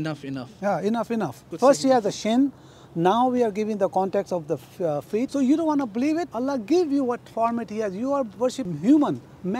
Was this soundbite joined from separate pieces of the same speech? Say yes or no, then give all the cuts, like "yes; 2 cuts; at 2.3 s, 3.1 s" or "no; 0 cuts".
yes; 4 cuts; at 1.5 s, 5.3 s, 6.3 s, 8.6 s